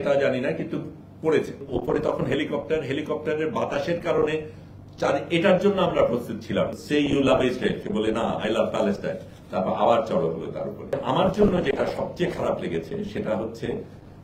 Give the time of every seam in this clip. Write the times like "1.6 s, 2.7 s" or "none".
1.6 s, 6.8 s, 11.0 s